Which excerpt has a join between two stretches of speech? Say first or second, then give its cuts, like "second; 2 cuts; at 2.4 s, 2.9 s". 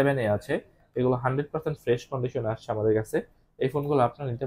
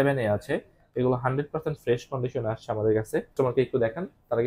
second; 1 cut; at 3.3 s